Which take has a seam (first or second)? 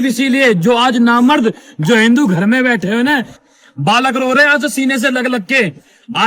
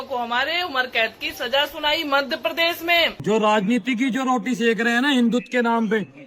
second